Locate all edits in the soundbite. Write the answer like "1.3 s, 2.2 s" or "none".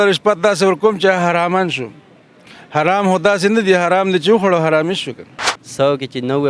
5.3 s